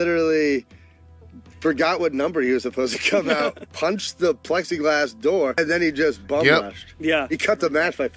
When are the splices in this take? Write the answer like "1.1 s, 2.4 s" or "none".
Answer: 5.6 s